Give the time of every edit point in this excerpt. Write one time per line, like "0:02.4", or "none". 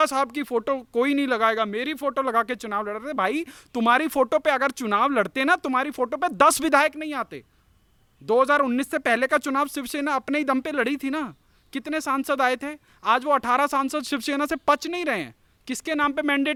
none